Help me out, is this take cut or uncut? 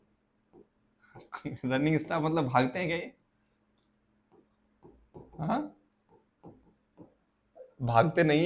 uncut